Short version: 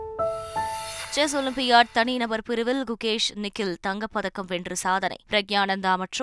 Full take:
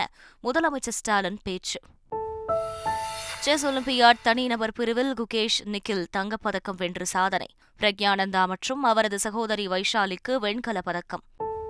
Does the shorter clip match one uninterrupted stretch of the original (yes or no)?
no